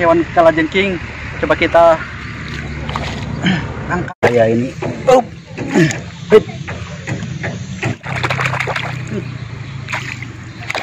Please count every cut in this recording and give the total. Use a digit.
2